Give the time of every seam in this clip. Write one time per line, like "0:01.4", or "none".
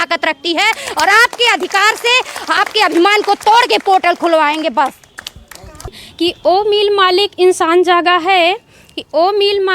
0:06.0